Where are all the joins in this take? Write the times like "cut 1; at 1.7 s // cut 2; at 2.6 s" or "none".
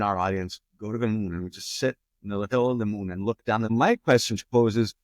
cut 1; at 3.7 s

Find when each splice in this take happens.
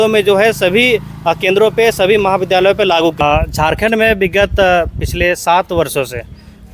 cut 1; at 3.2 s

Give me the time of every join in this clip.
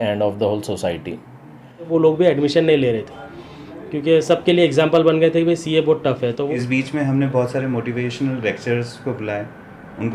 cut 1; at 1.9 s // cut 2; at 6.5 s

